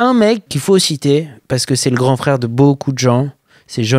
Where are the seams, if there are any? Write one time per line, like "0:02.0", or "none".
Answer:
none